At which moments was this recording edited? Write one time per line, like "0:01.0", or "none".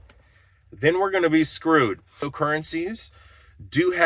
0:02.3

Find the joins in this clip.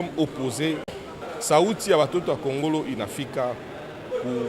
0:01.0

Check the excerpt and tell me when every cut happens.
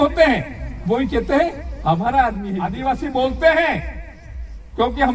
0:02.7

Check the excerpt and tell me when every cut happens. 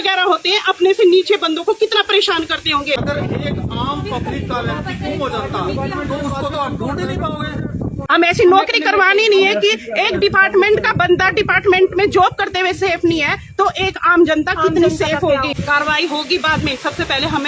0:03.0
0:07.9
0:15.6

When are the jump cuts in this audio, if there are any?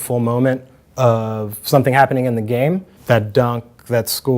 0:02.9

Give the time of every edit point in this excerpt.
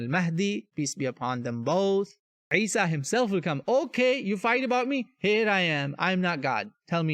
0:02.5

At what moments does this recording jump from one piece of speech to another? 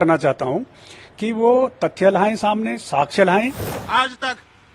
0:03.7

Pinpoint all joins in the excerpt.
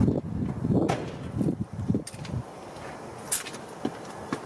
0:03.1

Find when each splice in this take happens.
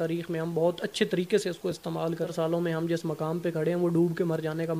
0:02.3

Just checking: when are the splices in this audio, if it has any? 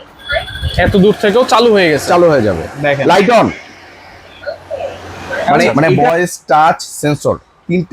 0:05.7

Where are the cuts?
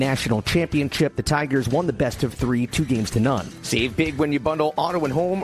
0:03.5

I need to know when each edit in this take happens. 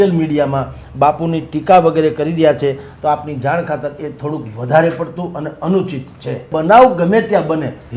0:06.5

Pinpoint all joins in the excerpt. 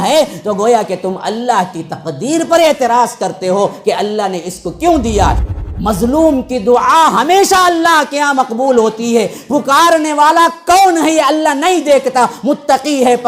0:05.4

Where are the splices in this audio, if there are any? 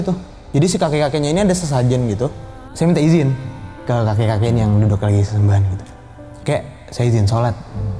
0:02.4

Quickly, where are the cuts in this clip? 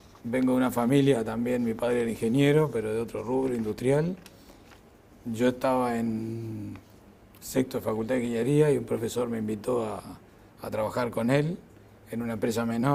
none

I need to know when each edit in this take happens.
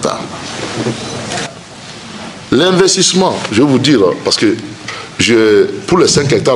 0:01.4

